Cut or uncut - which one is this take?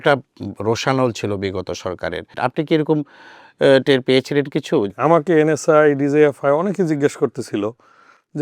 cut